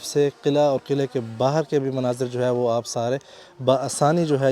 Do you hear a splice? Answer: no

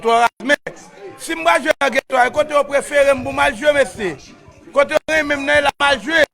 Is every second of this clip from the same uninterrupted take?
no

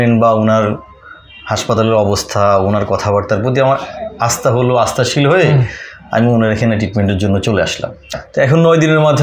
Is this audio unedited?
no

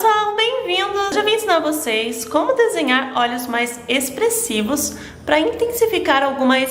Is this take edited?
yes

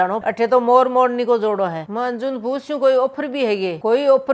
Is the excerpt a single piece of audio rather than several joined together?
yes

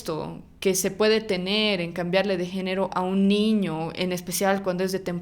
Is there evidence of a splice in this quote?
no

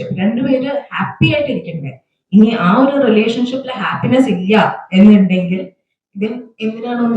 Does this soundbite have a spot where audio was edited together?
no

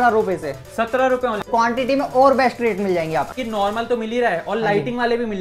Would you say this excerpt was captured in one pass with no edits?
no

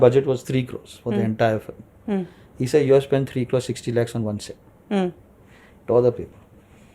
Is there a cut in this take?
no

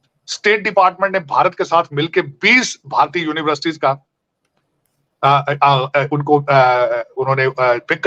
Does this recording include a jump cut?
no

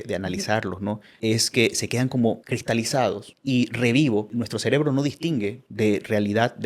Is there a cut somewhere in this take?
yes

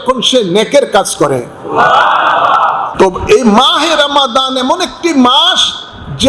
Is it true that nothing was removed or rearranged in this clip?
no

